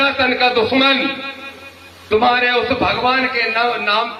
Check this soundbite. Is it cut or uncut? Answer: uncut